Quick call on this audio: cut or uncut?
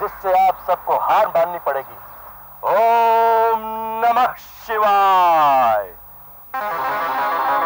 uncut